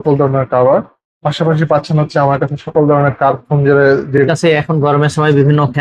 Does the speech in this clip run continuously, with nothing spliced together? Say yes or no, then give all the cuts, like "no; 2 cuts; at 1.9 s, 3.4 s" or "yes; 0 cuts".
no; 1 cut; at 4.2 s